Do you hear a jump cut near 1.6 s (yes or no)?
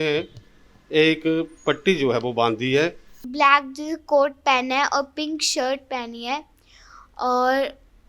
no